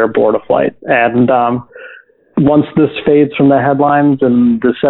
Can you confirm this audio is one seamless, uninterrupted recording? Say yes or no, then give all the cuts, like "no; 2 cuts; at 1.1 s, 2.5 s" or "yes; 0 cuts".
yes; 0 cuts